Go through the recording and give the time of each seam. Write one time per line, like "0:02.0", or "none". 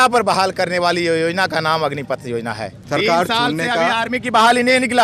0:02.8